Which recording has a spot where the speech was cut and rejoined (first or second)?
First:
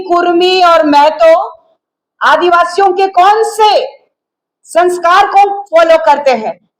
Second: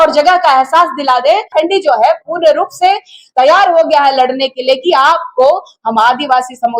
second